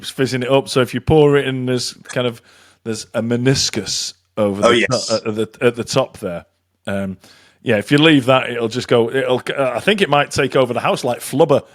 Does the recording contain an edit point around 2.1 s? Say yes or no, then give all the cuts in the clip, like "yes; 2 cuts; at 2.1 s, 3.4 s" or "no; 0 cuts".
no; 0 cuts